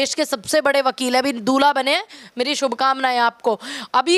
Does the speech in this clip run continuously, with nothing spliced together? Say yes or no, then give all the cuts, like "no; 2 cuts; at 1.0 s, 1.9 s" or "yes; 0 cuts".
yes; 0 cuts